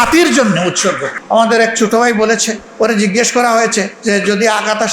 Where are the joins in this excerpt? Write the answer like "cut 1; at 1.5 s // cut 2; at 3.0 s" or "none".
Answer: cut 1; at 1.1 s // cut 2; at 2.6 s // cut 3; at 3.9 s